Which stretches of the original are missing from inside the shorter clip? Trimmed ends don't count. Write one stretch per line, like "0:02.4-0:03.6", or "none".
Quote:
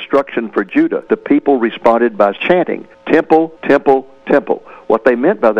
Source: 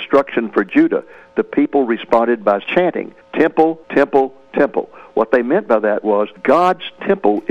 0:01.0-0:01.3